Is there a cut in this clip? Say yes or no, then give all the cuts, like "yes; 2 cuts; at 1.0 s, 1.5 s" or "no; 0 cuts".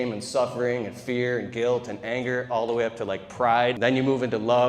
yes; 1 cut; at 3.8 s